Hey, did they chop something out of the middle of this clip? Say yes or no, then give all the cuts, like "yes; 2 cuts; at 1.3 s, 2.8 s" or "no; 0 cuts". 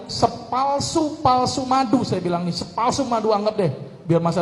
no; 0 cuts